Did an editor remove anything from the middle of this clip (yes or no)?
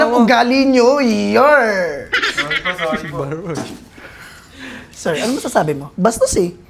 no